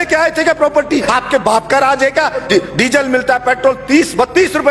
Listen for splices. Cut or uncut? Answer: cut